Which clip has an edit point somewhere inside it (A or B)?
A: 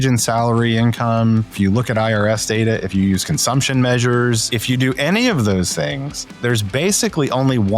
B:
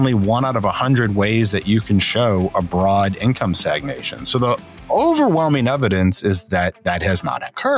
A